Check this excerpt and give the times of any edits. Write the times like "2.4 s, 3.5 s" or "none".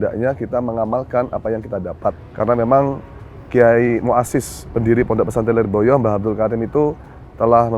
2.2 s

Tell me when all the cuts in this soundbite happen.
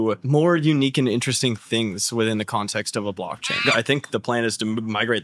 3.6 s

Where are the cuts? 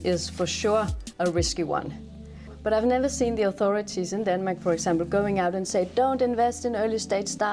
2.5 s

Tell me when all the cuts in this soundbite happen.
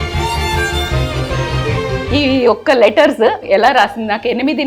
1.8 s, 3.4 s

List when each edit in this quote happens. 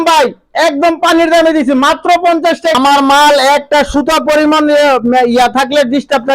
2.7 s

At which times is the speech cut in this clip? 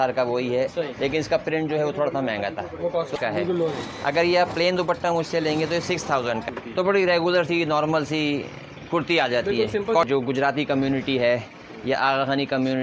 3.2 s, 6.5 s, 10.1 s

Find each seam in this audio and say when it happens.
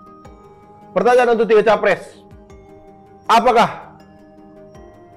0.9 s

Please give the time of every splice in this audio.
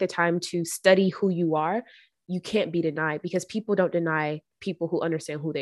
none

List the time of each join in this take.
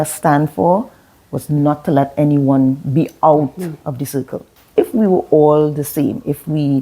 4.7 s

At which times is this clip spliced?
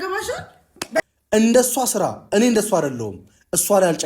1.0 s

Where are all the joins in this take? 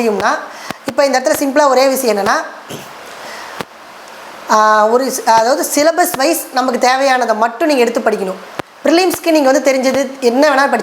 none

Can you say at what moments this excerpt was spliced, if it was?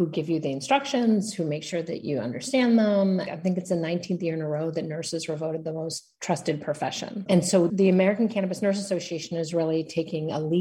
3.3 s, 7.6 s

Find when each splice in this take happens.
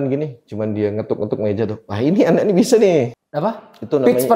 3.2 s

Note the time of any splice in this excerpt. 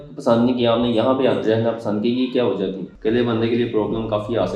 2.9 s

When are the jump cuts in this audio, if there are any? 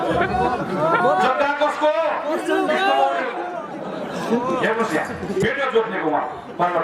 5.4 s

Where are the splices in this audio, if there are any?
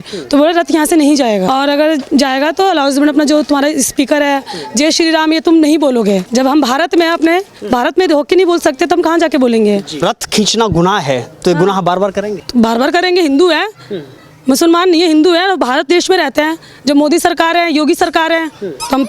1.5 s, 6.2 s, 10.0 s, 12.4 s

